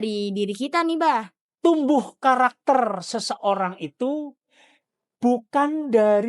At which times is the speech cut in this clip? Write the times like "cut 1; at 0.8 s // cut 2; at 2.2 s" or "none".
cut 1; at 1.4 s